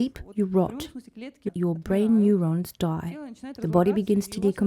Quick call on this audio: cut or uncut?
cut